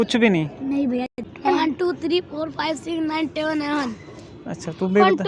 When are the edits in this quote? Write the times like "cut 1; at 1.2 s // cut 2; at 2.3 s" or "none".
cut 1; at 1.2 s